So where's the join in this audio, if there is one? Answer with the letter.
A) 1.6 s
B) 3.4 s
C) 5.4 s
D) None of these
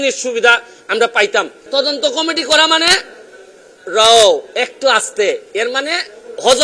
A